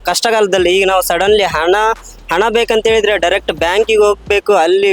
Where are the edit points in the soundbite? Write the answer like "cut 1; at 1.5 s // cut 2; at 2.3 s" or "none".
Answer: none